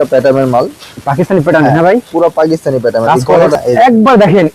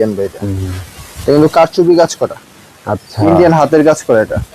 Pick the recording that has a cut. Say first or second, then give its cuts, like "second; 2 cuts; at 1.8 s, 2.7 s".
first; 1 cut; at 3.5 s